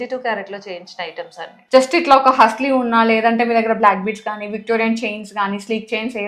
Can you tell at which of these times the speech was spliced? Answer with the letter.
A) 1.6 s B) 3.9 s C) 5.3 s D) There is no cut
A